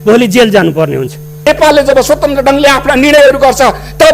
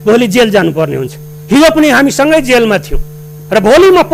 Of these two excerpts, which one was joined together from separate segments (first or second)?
first